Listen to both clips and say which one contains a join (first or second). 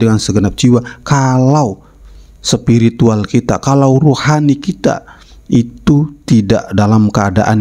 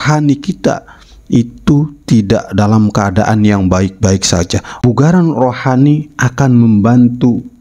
second